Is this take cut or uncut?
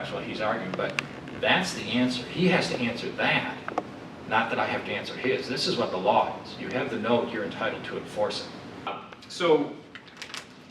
cut